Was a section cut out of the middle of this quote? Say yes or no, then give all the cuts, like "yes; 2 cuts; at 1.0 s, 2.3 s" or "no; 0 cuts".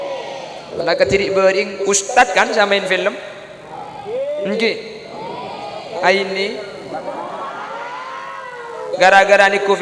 no; 0 cuts